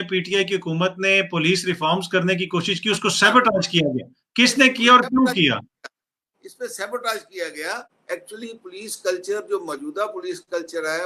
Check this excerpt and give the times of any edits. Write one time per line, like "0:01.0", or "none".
0:07.9